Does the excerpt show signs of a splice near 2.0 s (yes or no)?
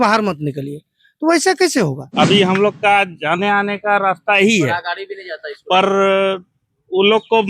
yes